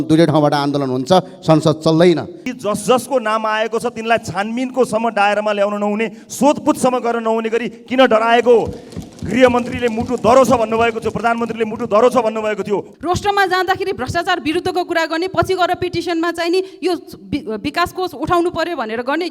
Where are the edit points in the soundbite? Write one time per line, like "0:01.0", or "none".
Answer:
0:02.4
0:12.9